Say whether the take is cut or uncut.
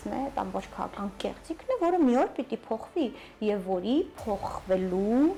uncut